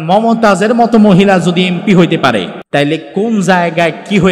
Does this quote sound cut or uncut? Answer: cut